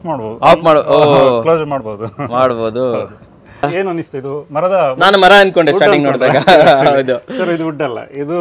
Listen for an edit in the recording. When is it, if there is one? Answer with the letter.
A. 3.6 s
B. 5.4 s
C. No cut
A